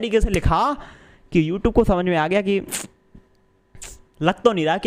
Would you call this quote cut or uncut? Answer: uncut